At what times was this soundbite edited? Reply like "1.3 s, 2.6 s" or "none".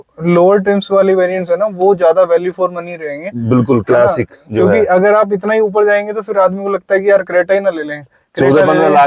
none